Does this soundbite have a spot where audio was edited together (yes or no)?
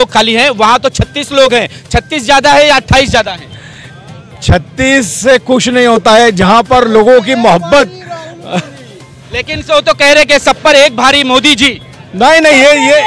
no